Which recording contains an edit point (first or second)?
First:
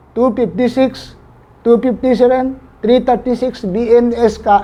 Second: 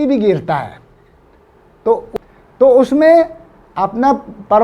second